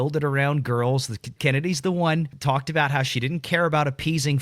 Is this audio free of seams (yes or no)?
no